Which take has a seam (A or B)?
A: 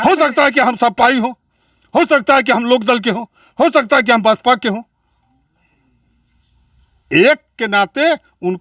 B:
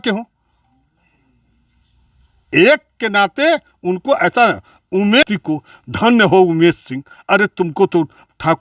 B